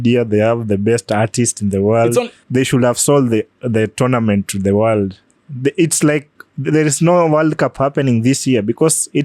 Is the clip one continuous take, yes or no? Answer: no